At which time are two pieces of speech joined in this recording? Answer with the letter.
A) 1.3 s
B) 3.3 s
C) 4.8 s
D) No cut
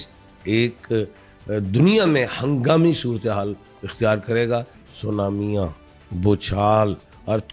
C